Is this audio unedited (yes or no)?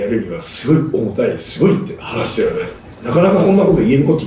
yes